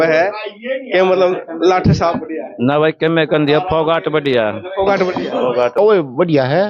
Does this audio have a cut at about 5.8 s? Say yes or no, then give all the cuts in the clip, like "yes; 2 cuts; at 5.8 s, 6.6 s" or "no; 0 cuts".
yes; 1 cut; at 5.8 s